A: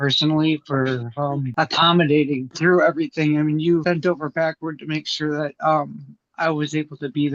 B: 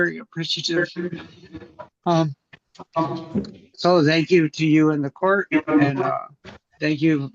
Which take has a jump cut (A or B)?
A